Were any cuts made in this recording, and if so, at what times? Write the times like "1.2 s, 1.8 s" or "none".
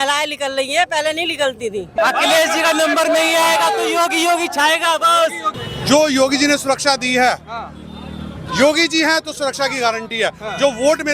2.0 s, 5.6 s